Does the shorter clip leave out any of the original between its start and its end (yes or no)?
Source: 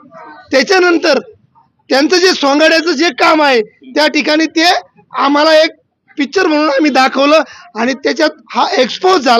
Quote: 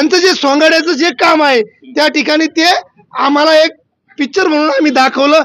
no